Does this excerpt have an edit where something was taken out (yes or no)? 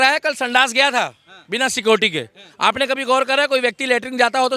no